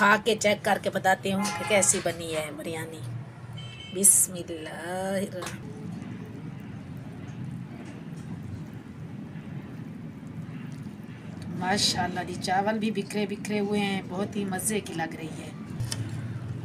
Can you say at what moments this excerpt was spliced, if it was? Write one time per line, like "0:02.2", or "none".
0:05.6